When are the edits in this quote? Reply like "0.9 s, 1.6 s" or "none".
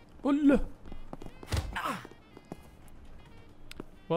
1.3 s, 2.4 s